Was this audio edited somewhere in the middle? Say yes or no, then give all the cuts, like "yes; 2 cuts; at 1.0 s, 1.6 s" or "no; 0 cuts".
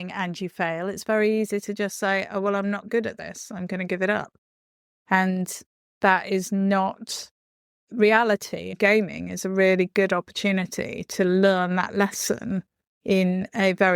no; 0 cuts